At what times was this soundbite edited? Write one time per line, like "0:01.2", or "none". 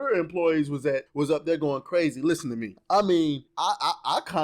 0:01.1
0:02.7
0:03.5